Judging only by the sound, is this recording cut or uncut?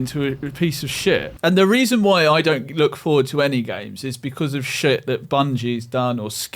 cut